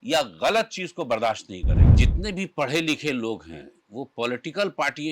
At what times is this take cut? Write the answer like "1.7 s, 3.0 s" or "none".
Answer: 1.9 s